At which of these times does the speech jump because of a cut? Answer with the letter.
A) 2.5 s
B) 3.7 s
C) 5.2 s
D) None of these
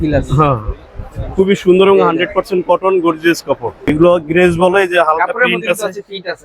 B